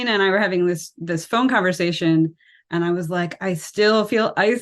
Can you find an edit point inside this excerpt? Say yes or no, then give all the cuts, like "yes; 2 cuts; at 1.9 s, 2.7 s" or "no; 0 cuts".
no; 0 cuts